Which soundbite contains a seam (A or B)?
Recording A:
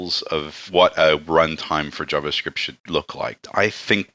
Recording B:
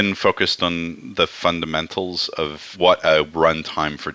A